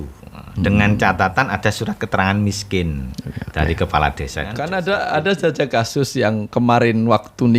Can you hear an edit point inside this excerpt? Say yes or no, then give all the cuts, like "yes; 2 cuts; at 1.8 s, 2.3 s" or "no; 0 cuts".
yes; 1 cut; at 4.6 s